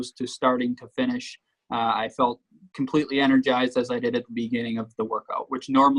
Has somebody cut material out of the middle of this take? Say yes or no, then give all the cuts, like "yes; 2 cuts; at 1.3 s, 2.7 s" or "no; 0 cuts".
no; 0 cuts